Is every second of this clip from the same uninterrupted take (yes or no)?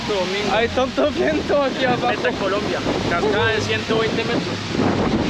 yes